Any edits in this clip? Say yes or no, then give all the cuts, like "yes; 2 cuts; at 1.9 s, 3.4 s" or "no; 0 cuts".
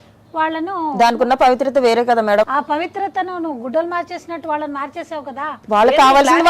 yes; 2 cuts; at 2.5 s, 5.6 s